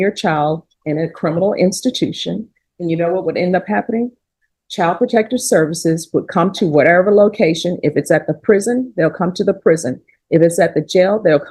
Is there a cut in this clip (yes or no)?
no